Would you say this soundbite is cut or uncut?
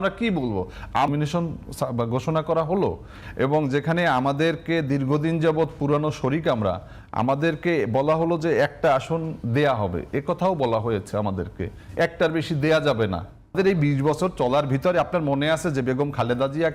cut